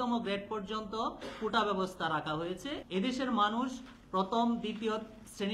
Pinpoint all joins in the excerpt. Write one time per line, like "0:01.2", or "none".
0:02.8